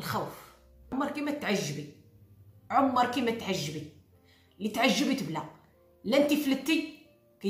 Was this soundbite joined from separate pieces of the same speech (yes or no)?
yes